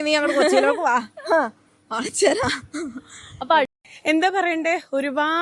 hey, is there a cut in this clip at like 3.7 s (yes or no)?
yes